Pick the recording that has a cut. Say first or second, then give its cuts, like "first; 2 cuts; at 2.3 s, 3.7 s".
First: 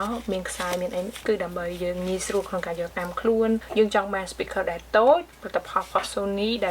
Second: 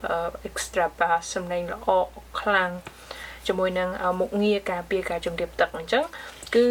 first; 1 cut; at 3.7 s